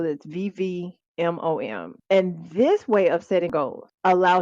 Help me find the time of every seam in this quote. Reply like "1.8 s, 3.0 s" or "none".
1.0 s, 1.9 s, 3.5 s